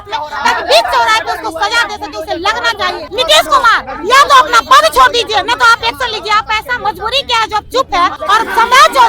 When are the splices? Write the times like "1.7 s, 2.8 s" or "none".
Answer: 3.0 s, 8.2 s